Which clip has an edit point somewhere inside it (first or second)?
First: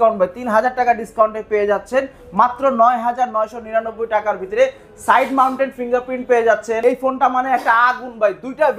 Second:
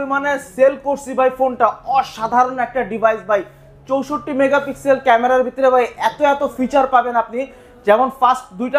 first